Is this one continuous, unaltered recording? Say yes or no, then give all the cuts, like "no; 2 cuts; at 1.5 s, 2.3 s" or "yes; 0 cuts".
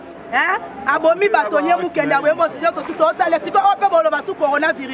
yes; 0 cuts